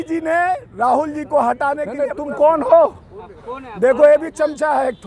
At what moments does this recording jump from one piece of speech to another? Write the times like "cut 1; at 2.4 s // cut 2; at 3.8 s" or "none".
cut 1; at 2.2 s